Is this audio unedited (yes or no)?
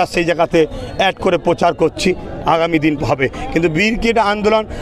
yes